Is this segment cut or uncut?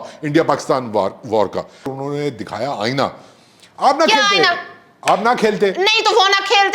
cut